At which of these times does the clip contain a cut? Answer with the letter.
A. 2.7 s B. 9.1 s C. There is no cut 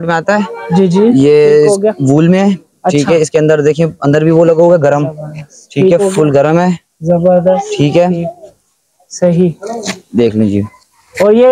C